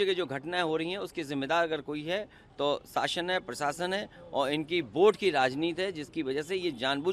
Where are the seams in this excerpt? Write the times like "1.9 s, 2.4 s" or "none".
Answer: none